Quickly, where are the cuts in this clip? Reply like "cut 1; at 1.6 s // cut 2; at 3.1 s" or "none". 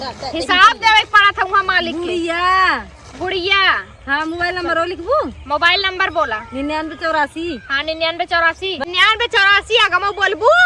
none